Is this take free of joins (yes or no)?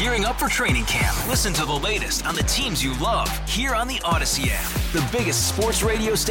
yes